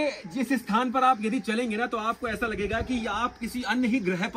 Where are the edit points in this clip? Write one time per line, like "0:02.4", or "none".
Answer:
none